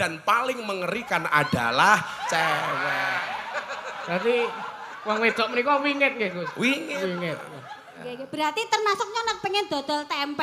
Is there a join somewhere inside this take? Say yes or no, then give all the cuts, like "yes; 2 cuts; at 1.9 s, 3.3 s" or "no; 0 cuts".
yes; 1 cut; at 8.0 s